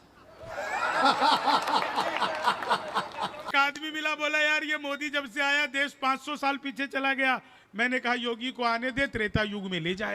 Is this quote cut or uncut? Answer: cut